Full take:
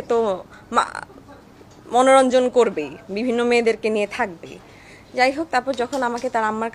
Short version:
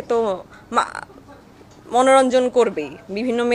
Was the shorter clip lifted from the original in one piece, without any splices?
yes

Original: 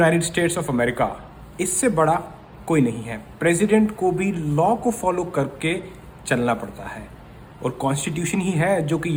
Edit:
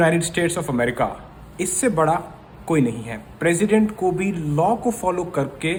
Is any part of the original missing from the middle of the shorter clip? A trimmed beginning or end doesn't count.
no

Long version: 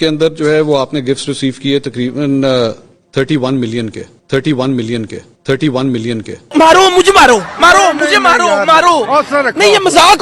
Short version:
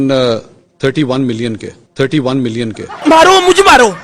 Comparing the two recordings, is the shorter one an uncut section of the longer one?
no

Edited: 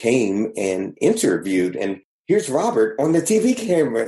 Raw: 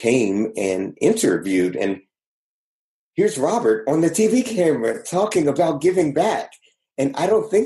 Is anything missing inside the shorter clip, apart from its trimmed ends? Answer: yes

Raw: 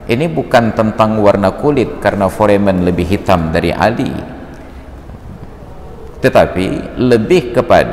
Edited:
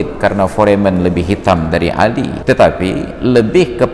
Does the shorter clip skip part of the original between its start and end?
yes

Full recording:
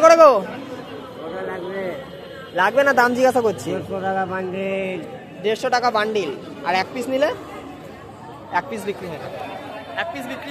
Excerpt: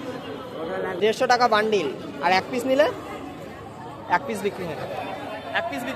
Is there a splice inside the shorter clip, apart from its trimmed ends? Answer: yes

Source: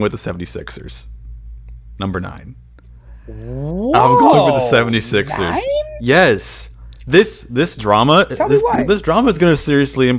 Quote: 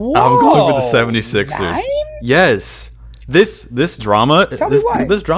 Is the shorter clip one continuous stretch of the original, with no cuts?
yes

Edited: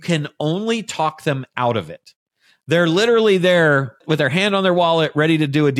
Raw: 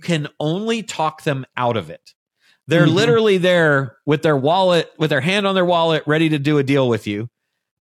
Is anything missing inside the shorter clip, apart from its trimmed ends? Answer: yes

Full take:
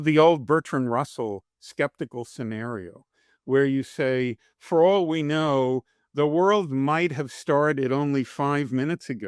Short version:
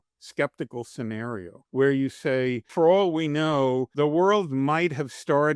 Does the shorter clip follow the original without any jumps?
no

